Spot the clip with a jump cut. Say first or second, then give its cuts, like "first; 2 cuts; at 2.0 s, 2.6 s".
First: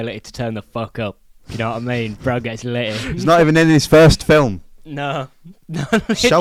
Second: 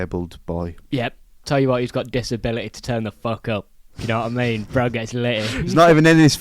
second; 1 cut; at 1.3 s